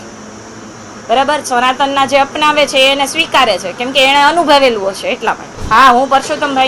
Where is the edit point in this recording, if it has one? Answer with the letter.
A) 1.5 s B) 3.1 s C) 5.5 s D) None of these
C